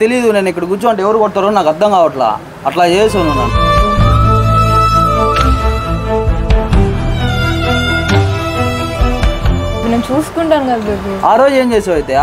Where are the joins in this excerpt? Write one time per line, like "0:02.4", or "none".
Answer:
none